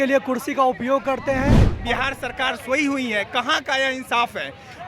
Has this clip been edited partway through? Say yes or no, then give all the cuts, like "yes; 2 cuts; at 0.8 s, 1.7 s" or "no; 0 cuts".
yes; 1 cut; at 1.7 s